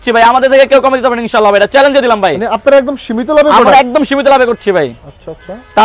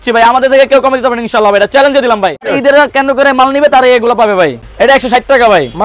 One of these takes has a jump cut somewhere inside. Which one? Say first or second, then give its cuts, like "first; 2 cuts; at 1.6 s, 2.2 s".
second; 2 cuts; at 2.5 s, 4.6 s